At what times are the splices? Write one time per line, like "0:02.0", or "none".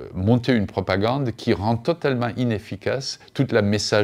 none